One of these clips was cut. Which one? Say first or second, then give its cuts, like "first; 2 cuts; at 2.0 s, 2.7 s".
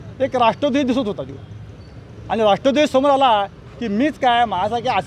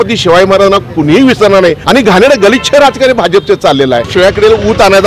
second; 2 cuts; at 1.8 s, 4.1 s